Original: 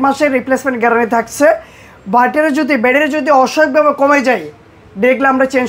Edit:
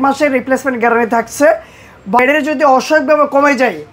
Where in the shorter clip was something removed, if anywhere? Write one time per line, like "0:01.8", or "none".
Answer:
0:02.2